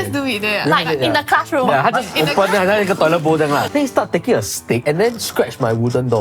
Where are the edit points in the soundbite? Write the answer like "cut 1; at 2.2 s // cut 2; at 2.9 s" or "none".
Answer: cut 1; at 3.6 s // cut 2; at 4.8 s